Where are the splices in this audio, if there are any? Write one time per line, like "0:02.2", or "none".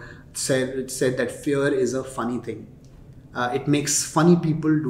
none